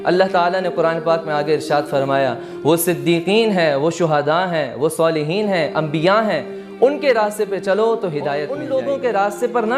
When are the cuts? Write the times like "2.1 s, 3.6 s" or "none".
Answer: 8.5 s